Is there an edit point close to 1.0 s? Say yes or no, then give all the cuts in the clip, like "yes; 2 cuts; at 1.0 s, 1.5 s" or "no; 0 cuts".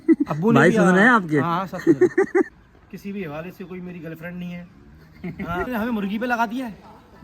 no; 2 cuts; at 2.5 s, 5.7 s